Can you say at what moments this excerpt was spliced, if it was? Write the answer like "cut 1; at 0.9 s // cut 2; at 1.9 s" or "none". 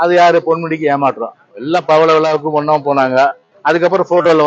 cut 1; at 3.5 s